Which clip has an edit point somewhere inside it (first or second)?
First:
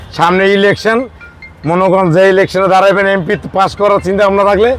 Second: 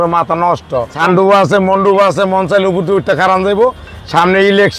second